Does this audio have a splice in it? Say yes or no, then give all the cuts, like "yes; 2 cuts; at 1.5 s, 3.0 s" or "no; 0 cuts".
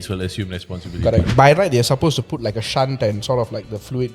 yes; 1 cut; at 1.3 s